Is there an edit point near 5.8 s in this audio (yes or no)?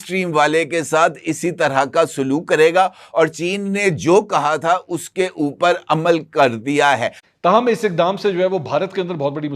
no